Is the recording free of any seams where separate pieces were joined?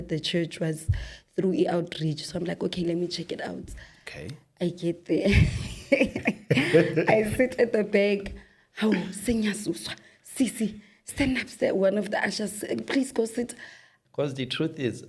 no; 1 cut; at 13.9 s

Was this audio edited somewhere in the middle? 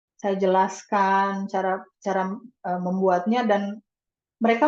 no; 0 cuts

